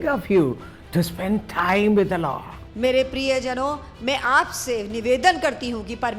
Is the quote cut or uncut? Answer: uncut